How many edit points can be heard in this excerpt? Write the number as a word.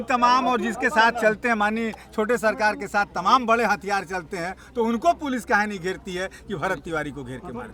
zero